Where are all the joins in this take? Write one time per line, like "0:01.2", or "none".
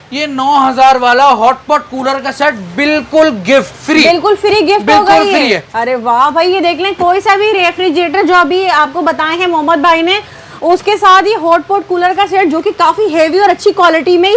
none